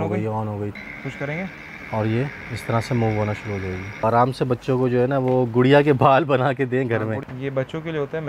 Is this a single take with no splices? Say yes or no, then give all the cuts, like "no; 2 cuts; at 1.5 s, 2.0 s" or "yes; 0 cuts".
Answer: no; 3 cuts; at 0.8 s, 4.0 s, 7.2 s